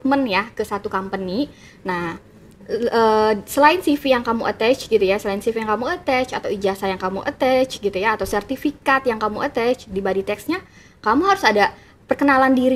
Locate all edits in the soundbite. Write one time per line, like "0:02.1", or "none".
none